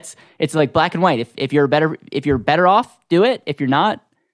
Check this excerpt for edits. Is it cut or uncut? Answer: uncut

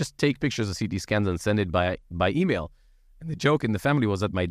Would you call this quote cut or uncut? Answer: uncut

